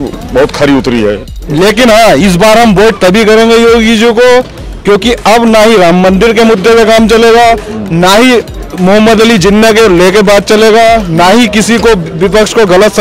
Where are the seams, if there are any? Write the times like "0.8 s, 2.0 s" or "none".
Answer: 1.2 s